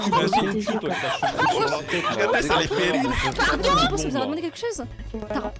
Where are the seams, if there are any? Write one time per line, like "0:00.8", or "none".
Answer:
0:03.3